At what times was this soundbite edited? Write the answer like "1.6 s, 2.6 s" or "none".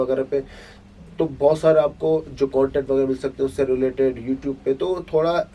none